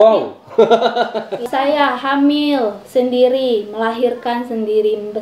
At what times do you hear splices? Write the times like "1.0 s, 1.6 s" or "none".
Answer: 1.4 s

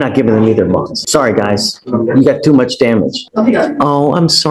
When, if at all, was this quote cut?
1.0 s, 3.2 s

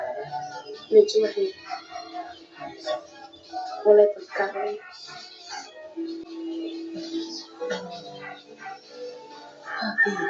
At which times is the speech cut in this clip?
none

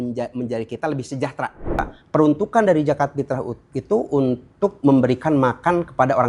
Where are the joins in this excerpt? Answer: 2.0 s

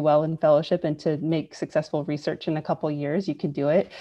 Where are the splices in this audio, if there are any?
none

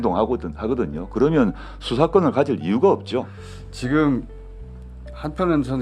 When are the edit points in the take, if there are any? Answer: none

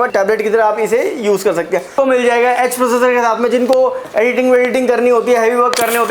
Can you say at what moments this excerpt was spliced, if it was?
1.9 s

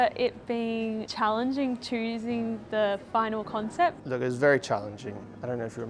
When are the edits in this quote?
1.1 s, 4.0 s

